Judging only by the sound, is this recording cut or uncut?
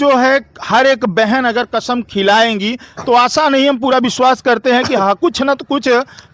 uncut